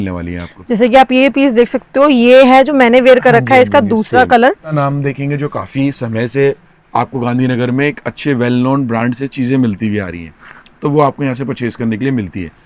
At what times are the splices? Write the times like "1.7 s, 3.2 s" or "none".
4.8 s